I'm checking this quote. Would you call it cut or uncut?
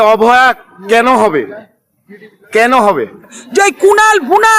cut